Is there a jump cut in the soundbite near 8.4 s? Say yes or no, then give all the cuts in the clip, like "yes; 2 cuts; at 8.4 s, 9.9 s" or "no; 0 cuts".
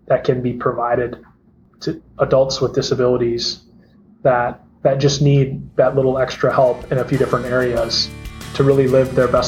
yes; 1 cut; at 8.4 s